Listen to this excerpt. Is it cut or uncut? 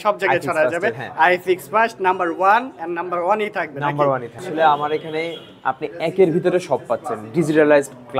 cut